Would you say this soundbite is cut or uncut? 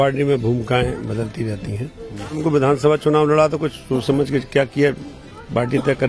cut